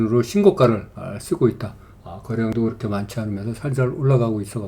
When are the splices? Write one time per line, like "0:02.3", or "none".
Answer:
none